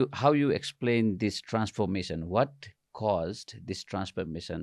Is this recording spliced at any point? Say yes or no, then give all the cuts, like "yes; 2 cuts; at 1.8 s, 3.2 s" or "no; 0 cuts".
no; 0 cuts